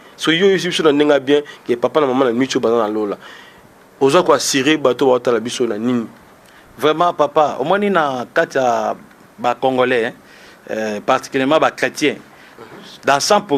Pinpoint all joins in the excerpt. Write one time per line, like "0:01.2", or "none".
none